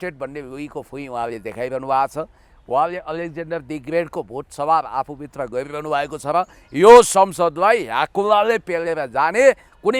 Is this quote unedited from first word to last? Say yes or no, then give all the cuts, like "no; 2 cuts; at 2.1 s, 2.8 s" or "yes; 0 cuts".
yes; 0 cuts